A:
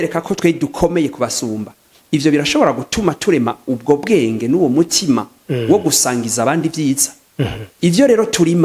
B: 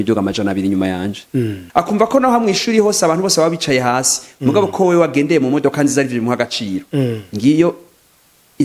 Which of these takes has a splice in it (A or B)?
B